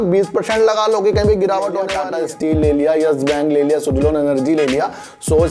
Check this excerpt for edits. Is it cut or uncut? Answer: cut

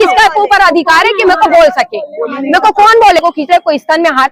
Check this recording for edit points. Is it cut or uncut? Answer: cut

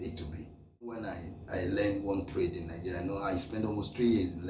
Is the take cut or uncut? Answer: cut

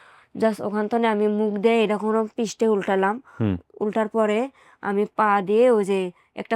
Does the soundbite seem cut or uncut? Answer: uncut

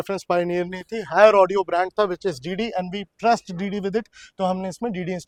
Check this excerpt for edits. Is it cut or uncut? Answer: uncut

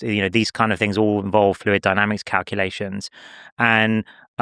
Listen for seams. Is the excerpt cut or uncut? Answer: uncut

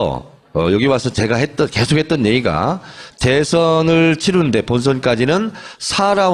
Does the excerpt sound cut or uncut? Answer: uncut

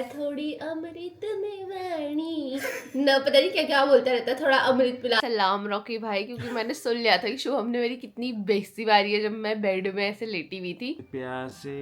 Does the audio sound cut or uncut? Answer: cut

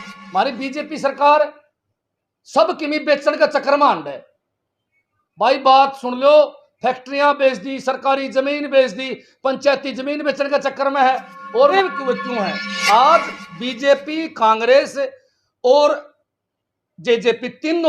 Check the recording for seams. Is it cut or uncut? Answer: cut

